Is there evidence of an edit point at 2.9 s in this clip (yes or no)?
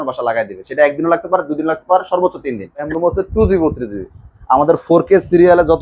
yes